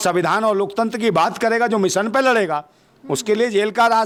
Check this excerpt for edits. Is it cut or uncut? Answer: uncut